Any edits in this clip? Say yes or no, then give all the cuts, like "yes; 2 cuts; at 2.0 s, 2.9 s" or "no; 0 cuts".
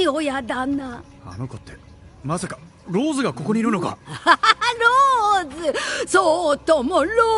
no; 0 cuts